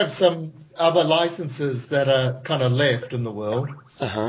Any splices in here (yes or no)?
yes